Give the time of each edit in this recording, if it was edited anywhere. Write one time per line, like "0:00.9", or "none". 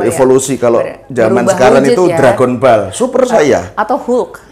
none

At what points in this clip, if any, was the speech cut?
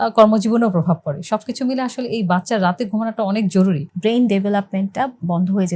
0:03.9

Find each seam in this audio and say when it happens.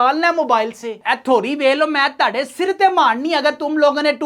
0:01.0

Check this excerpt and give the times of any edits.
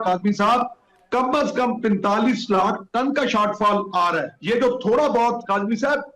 0:04.3

